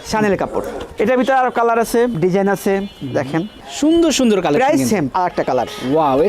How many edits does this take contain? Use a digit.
2